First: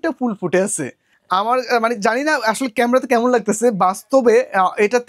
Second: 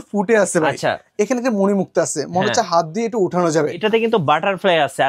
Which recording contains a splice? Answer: second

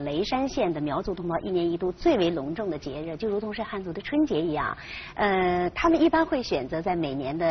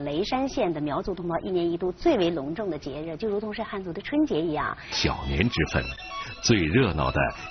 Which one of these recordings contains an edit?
first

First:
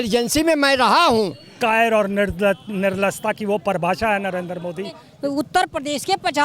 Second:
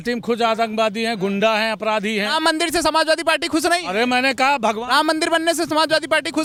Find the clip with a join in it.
first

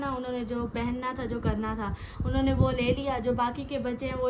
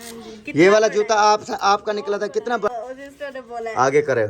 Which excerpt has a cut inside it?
second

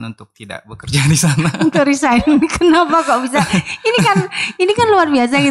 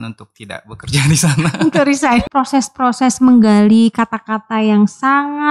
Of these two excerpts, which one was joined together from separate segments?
second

